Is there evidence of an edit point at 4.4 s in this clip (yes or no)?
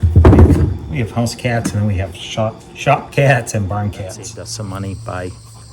yes